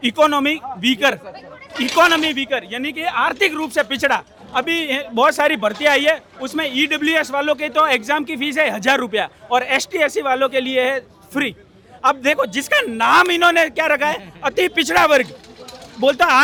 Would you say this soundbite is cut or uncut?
uncut